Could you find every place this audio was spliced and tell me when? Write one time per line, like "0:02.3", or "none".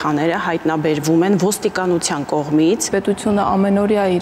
0:02.9